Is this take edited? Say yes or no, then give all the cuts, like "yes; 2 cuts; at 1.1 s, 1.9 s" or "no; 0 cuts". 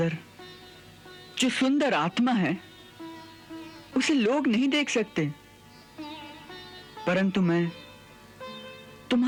no; 0 cuts